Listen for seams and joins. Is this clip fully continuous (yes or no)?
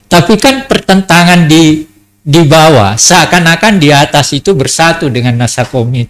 yes